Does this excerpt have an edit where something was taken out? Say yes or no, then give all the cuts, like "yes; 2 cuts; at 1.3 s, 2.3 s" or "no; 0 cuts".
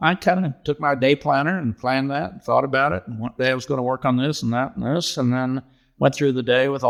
no; 0 cuts